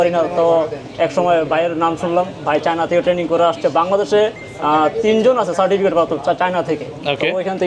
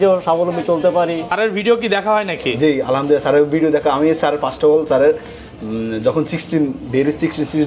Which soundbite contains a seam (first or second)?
second